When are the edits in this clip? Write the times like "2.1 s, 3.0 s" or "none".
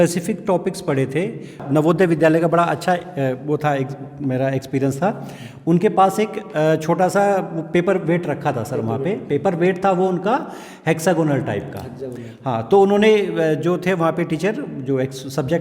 1.6 s